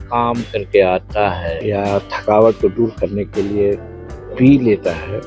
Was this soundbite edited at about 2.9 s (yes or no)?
no